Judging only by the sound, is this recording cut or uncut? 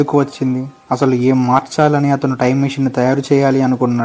uncut